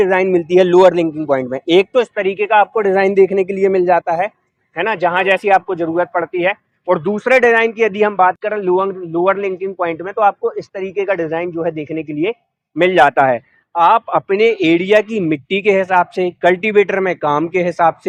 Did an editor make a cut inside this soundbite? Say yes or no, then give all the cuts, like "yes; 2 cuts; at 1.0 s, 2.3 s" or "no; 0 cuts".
no; 0 cuts